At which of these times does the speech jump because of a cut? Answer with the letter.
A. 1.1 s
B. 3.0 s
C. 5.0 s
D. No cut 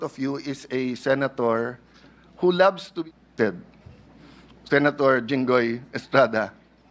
B